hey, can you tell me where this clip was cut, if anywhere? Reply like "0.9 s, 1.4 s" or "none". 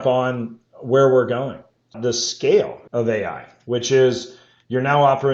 1.9 s, 2.8 s